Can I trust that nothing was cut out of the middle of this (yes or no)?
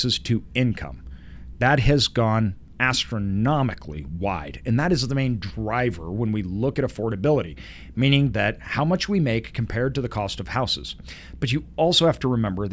yes